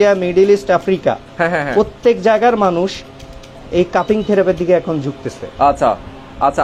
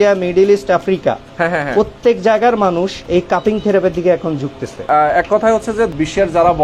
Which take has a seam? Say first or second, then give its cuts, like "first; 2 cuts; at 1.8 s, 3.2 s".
second; 3 cuts; at 3.0 s, 4.8 s, 5.9 s